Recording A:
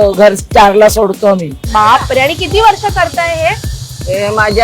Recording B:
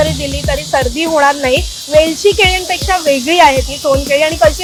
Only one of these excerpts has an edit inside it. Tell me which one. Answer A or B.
A